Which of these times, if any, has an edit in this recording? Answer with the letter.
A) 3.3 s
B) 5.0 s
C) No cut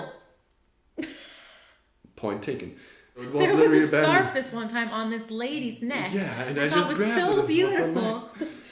A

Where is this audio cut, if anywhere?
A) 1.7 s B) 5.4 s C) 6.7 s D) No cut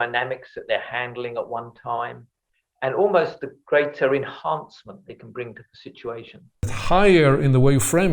C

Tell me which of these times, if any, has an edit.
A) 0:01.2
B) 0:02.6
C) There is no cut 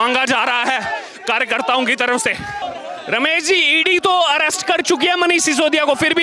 B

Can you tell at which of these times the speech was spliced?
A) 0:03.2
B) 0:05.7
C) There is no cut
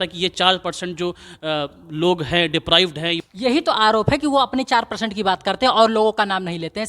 A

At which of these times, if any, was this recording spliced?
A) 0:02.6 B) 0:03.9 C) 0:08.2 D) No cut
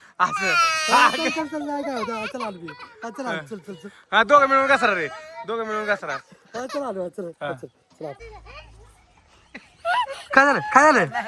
C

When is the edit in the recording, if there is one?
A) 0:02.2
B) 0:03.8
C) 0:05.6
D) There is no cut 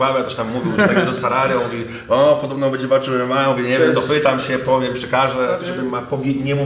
C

